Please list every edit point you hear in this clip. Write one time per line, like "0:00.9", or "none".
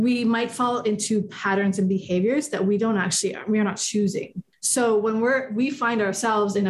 none